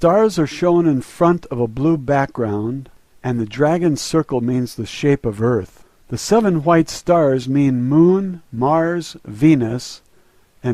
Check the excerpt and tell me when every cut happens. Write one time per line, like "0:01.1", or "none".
0:04.5